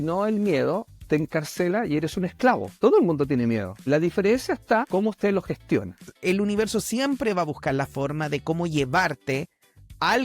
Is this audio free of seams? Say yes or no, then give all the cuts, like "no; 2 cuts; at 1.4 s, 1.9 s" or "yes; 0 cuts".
no; 4 cuts; at 2.7 s, 3.7 s, 4.9 s, 6.1 s